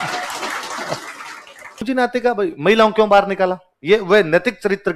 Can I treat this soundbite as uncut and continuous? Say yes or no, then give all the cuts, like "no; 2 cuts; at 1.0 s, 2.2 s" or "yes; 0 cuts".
no; 1 cut; at 1.8 s